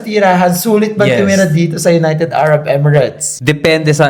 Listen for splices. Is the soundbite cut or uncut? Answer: uncut